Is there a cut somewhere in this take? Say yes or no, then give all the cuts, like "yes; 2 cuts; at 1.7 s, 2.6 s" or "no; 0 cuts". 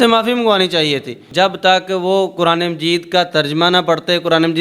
yes; 1 cut; at 1.2 s